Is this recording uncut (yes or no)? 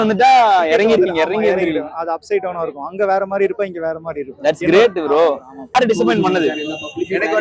yes